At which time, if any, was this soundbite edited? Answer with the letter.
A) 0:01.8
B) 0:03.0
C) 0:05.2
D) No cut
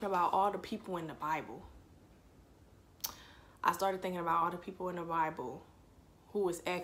D